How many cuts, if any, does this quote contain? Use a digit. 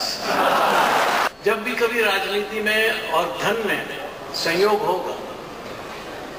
1